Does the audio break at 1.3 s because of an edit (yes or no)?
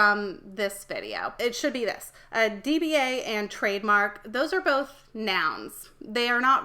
yes